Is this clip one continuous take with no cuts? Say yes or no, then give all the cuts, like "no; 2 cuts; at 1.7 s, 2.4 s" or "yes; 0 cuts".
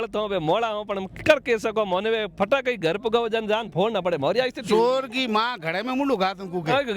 yes; 0 cuts